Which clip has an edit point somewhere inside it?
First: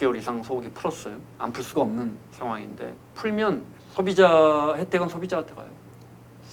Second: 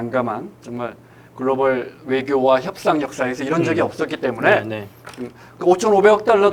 first; 2 cuts; at 3.0 s, 3.8 s

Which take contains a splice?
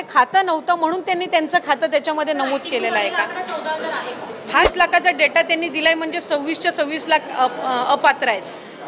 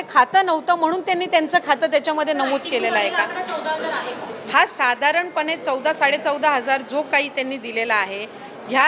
first; 1 cut; at 4.7 s

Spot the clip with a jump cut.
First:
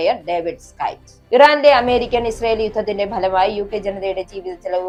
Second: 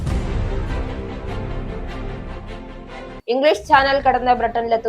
second; 1 cut; at 3.2 s

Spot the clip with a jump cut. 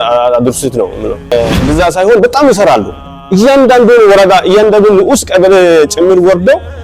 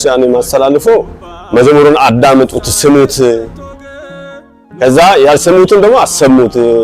first; 1 cut; at 1.3 s

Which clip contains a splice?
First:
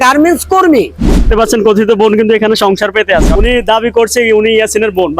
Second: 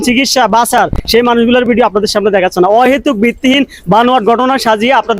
first; 2 cuts; at 1.3 s, 3.3 s

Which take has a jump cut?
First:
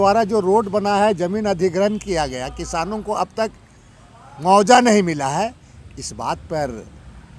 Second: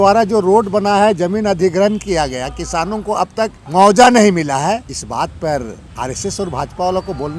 second; 3 cuts; at 3.6 s, 5.0 s, 5.8 s

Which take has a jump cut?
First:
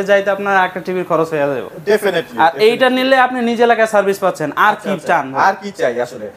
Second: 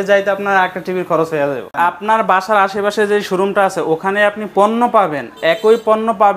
second; 1 cut; at 1.7 s

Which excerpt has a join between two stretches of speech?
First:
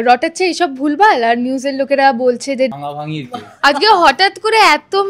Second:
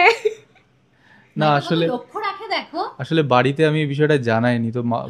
first; 1 cut; at 2.7 s

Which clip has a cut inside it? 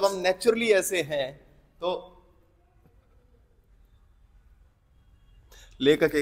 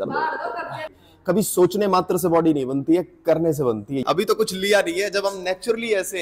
second; 2 cuts; at 1.1 s, 4.0 s

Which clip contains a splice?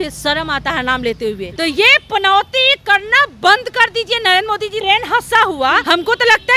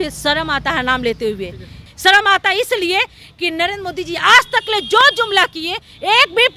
first; 3 cuts; at 1.5 s, 4.8 s, 5.8 s

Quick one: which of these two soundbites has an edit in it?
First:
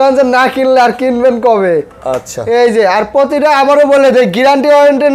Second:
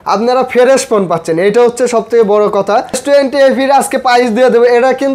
second; 1 cut; at 3.0 s

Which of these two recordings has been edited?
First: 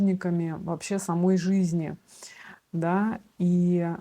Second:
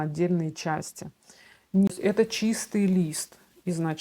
second; 1 cut; at 1.9 s

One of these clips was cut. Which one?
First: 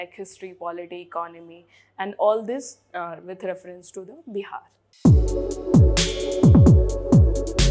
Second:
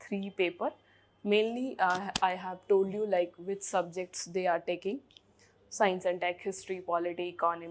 first; 1 cut; at 4.9 s

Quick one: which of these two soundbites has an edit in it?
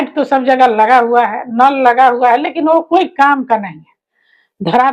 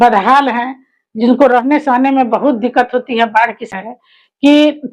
second; 1 cut; at 3.7 s

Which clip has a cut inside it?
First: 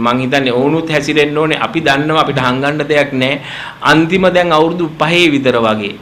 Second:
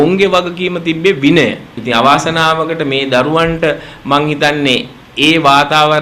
second; 1 cut; at 1.8 s

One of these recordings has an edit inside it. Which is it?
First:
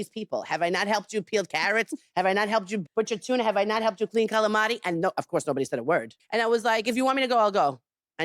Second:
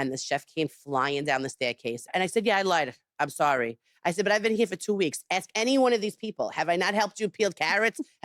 first; 1 cut; at 6.1 s

